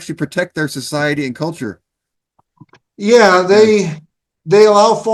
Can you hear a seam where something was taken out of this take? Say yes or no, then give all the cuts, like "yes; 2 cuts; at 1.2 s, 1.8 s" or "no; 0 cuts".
no; 0 cuts